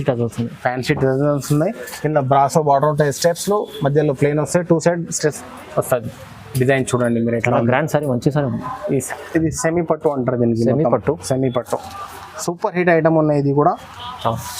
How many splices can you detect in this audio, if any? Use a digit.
1